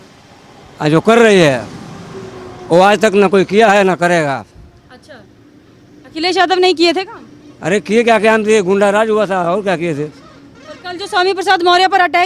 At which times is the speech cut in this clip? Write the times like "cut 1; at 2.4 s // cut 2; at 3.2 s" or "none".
none